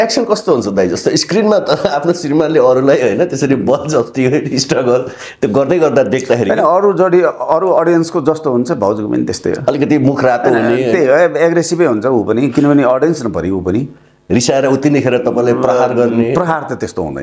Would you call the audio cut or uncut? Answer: uncut